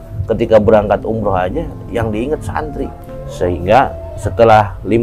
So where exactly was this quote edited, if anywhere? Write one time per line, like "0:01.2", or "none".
0:03.0